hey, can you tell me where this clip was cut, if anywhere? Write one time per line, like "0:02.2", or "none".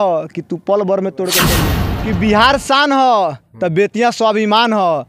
0:01.5